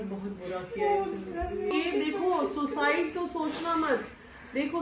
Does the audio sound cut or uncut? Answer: cut